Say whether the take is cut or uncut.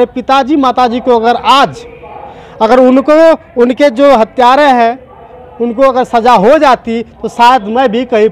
uncut